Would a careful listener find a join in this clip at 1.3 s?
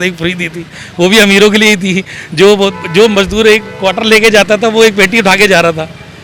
no; 0 cuts

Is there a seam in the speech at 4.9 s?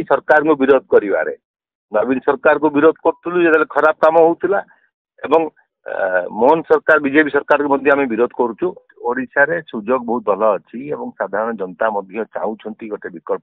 no; 1 cut; at 8.9 s

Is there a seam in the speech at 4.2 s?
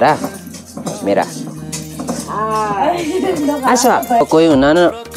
yes; 1 cut; at 4.2 s

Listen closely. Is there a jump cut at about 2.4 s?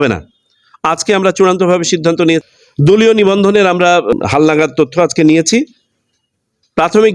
yes; 2 cuts; at 2.4 s, 4.2 s

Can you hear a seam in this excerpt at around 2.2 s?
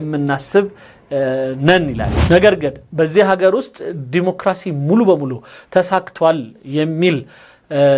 yes; 1 cut; at 2.2 s

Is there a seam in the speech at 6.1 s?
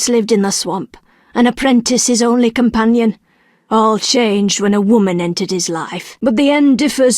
yes; 1 cut; at 6.1 s

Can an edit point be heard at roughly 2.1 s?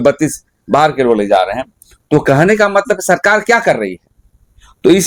no; 0 cuts

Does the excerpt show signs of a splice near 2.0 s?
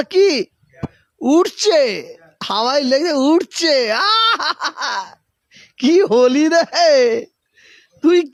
no; 0 cuts

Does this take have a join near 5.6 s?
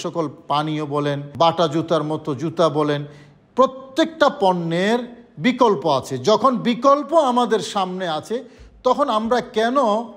no; 1 cut; at 1.2 s

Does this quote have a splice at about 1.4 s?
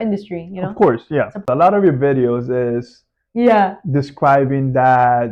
yes; 1 cut; at 1.4 s

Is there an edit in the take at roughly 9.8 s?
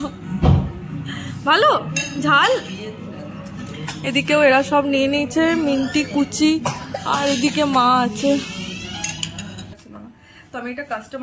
yes; 1 cut; at 9.8 s

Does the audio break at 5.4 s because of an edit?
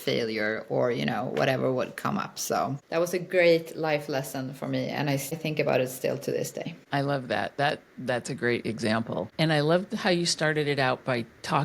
yes; 4 cuts; at 2.8 s, 5.4 s, 6.8 s, 9.3 s

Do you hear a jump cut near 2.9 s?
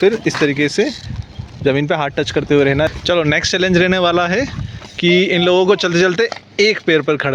yes; 1 cut; at 2.9 s

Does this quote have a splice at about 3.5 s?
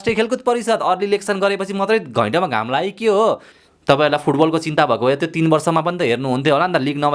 yes; 1 cut; at 3.5 s

